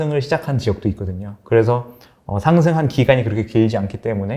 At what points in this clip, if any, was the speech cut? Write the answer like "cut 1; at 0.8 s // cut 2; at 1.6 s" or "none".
none